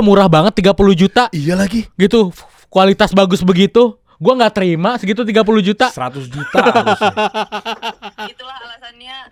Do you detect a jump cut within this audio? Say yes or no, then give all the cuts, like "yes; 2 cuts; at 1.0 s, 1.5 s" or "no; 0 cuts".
no; 0 cuts